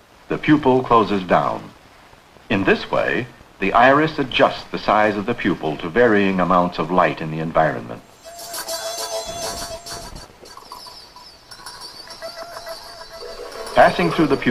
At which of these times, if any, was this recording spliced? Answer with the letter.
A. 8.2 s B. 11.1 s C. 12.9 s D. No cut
B